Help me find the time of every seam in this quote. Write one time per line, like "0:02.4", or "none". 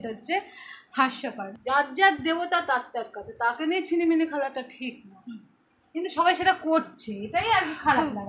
0:01.5